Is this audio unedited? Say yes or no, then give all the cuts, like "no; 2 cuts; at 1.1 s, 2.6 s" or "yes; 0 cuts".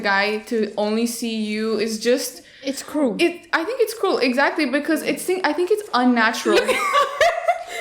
yes; 0 cuts